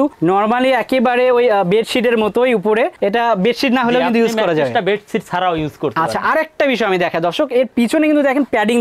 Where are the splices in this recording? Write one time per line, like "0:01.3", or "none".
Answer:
none